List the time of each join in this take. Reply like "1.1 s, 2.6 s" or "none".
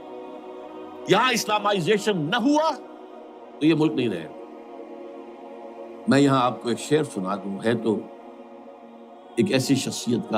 4.3 s, 6.0 s